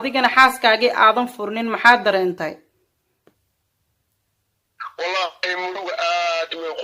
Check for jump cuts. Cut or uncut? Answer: uncut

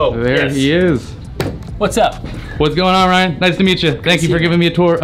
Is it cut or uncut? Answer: uncut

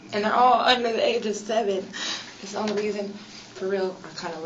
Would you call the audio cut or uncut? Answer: uncut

